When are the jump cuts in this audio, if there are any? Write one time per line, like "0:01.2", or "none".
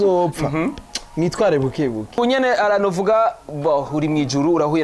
0:02.2